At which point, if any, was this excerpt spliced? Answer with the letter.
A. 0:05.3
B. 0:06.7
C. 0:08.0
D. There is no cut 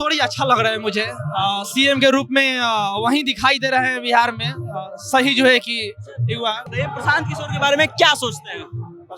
B